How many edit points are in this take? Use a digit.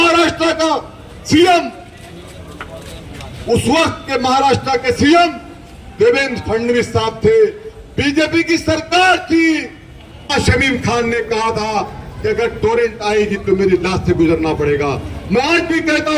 1